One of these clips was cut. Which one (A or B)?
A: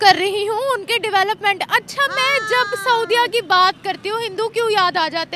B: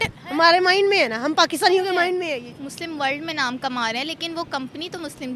B